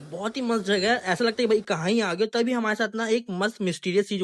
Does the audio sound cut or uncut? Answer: uncut